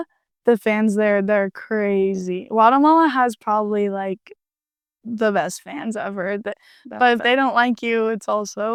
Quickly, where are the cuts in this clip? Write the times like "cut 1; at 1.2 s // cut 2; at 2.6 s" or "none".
none